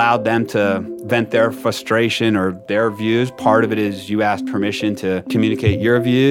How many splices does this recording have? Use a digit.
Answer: 1